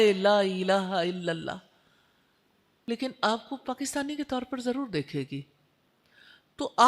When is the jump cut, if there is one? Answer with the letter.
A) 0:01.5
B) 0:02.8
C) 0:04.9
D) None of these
B